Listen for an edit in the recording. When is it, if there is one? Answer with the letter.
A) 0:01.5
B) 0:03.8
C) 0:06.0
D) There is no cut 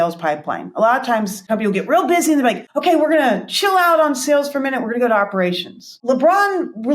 C